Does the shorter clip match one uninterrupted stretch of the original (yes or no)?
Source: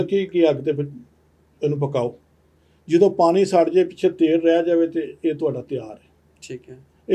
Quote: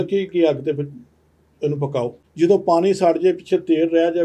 no